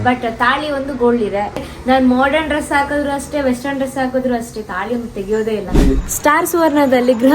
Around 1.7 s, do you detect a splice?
yes; 2 cuts; at 1.7 s, 5.8 s

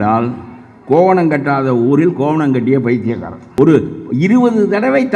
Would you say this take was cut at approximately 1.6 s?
no; 1 cut; at 3.5 s

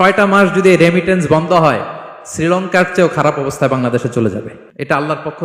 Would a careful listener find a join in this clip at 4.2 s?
yes; 1 cut; at 4.2 s

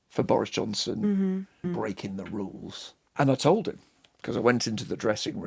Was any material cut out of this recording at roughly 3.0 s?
yes; 2 cuts; at 1.6 s, 3.0 s

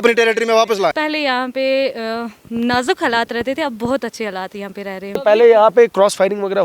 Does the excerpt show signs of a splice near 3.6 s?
no; 2 cuts; at 0.9 s, 5.2 s

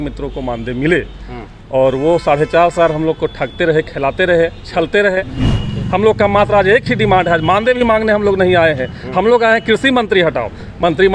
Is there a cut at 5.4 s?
yes; 1 cut; at 5.4 s

